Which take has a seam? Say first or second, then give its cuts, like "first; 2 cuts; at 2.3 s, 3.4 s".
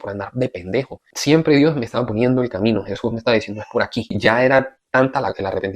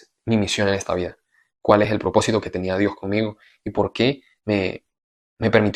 first; 2 cuts; at 1.1 s, 4.2 s